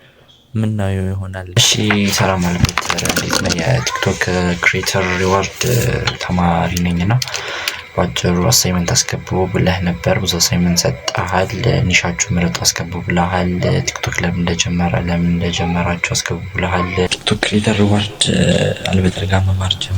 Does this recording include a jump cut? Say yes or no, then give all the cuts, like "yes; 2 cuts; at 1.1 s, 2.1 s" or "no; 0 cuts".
yes; 2 cuts; at 1.5 s, 17.2 s